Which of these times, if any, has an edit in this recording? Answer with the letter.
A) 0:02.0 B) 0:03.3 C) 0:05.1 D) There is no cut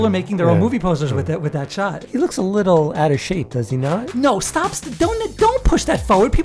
A